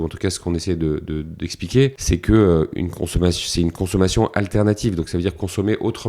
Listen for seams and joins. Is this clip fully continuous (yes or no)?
no